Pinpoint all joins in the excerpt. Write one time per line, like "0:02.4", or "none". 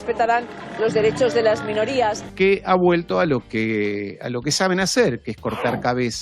0:02.4